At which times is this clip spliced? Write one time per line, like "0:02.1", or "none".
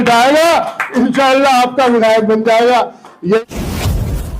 0:03.4